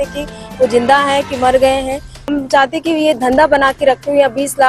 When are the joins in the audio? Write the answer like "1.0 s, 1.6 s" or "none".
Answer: 2.3 s